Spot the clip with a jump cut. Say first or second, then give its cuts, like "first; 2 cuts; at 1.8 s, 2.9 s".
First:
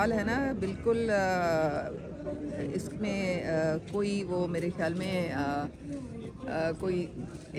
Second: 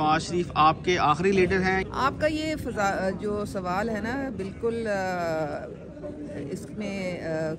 second; 1 cut; at 1.8 s